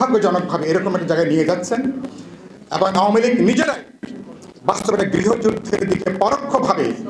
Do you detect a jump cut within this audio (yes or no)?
no